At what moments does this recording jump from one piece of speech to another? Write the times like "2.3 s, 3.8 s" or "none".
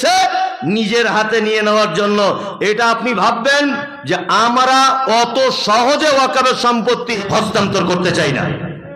7.2 s